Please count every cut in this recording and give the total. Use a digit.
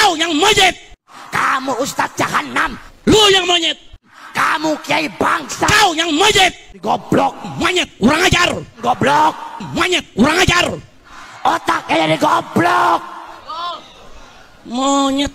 1